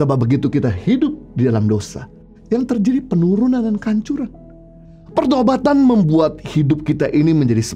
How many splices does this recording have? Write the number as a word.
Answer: one